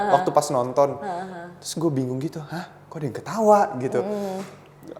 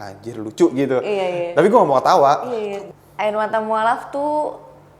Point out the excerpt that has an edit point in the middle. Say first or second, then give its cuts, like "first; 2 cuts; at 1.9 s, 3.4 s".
second; 1 cut; at 2.8 s